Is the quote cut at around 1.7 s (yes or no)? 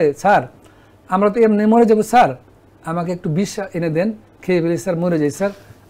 no